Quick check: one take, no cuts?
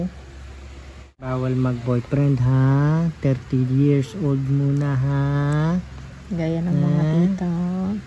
no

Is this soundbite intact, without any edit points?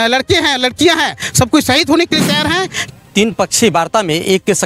no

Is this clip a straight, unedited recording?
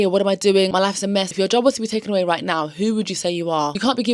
no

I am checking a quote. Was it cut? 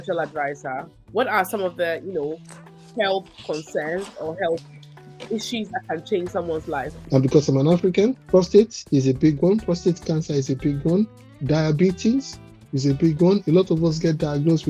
yes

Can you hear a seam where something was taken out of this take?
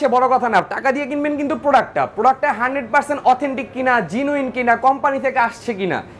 no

